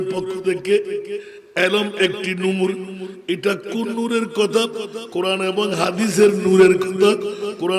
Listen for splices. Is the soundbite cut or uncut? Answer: uncut